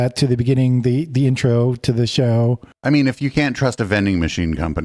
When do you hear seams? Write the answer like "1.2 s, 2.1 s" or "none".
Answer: 2.7 s